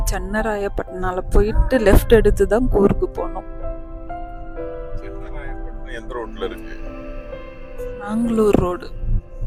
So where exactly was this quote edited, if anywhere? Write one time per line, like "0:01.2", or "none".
none